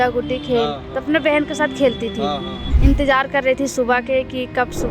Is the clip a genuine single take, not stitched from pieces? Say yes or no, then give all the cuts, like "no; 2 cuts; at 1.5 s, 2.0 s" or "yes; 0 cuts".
no; 1 cut; at 2.6 s